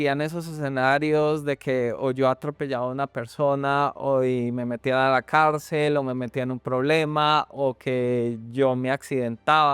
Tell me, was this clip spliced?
no; 0 cuts

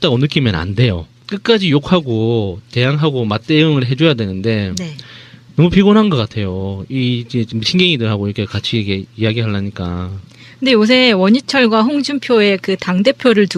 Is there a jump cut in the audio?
yes; 1 cut; at 12.6 s

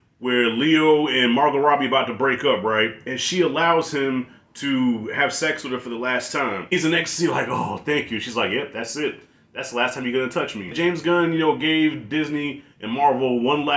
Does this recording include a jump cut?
yes; 2 cuts; at 6.7 s, 10.7 s

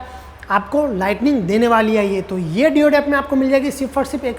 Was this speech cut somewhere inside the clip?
no; 0 cuts

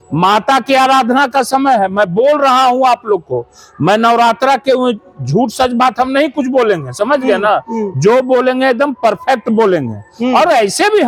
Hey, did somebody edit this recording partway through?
no; 0 cuts

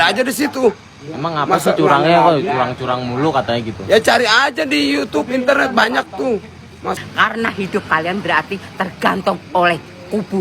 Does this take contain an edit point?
yes; 1 cut; at 6.9 s

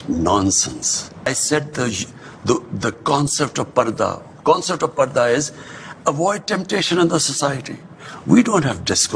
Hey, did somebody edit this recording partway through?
yes; 1 cut; at 1.3 s

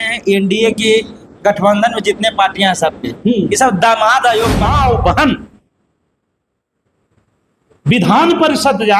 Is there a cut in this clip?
yes; 1 cut; at 4.7 s

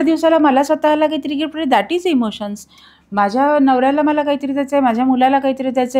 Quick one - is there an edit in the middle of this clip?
no; 0 cuts

